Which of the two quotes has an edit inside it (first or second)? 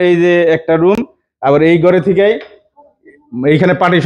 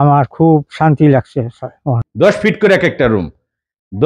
second